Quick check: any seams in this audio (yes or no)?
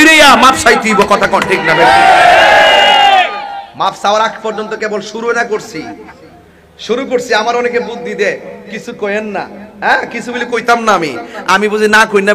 no